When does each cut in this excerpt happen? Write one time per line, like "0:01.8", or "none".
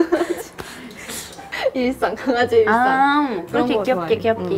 0:01.4